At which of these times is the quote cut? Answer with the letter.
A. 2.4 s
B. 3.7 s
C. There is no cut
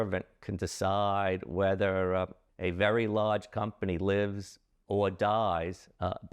A